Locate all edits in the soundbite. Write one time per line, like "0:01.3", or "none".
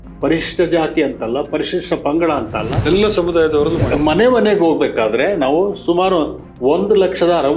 0:02.8
0:03.9